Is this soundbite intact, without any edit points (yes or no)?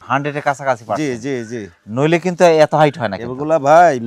yes